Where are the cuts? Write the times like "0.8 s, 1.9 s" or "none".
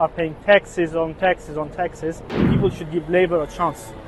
2.5 s